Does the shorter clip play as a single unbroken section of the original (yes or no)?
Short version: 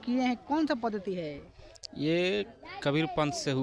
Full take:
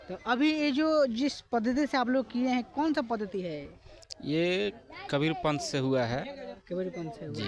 yes